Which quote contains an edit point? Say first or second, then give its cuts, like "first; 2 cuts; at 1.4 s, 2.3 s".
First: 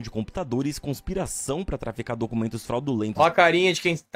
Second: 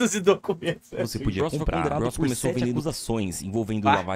second; 1 cut; at 2.8 s